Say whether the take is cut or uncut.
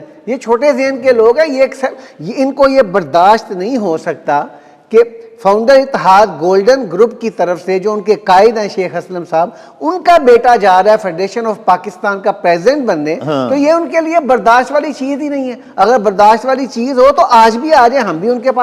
uncut